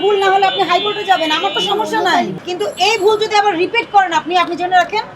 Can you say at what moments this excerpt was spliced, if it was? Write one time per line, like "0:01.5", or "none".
0:02.3